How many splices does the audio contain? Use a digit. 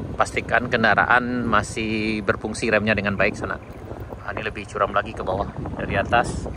0